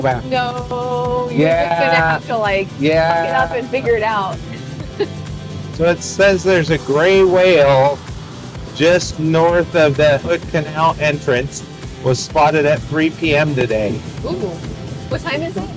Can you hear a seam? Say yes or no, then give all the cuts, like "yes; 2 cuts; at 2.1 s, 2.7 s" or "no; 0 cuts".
yes; 1 cut; at 5.4 s